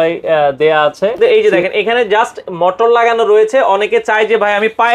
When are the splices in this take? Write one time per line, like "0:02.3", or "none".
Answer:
0:01.4